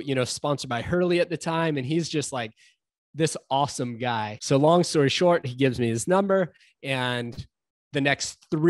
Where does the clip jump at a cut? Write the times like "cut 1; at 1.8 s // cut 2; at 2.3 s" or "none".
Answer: cut 1; at 4.4 s